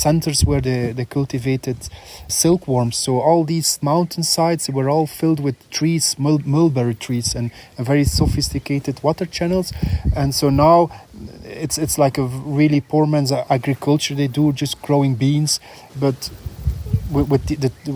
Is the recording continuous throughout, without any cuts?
no; 3 cuts; at 2.3 s, 13.4 s, 15.8 s

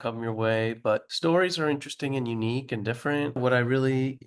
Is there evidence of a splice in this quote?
yes; 2 cuts; at 1.1 s, 3.4 s

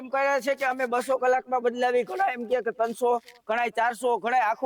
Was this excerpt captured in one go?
yes; 0 cuts

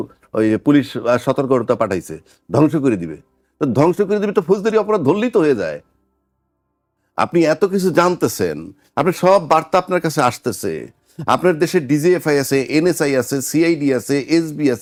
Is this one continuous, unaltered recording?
yes; 0 cuts

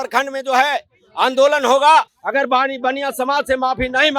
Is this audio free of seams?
no; 1 cut; at 2.1 s

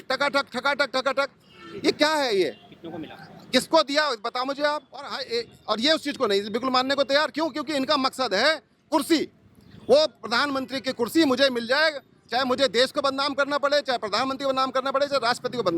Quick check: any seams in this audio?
yes; 1 cut; at 5.2 s

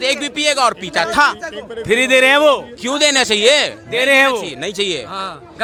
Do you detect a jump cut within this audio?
no; 0 cuts

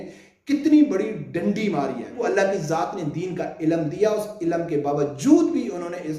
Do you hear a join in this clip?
yes; 1 cut; at 2.2 s

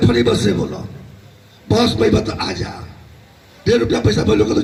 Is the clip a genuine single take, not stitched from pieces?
yes; 0 cuts

